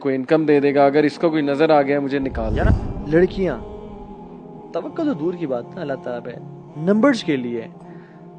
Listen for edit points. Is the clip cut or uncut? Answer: cut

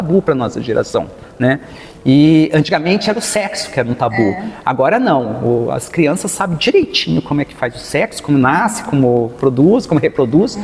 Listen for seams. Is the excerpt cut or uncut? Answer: uncut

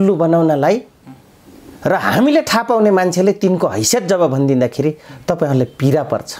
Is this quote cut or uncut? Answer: uncut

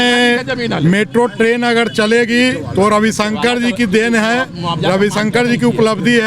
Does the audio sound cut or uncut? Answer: uncut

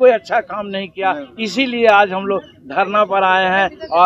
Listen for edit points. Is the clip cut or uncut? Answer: uncut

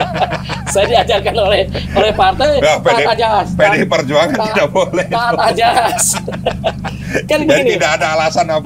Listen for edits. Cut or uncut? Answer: uncut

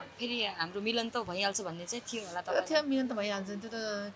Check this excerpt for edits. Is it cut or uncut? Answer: uncut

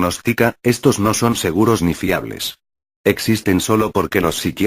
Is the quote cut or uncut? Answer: cut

